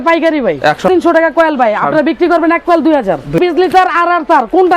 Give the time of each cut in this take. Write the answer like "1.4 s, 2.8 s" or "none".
0.9 s, 3.4 s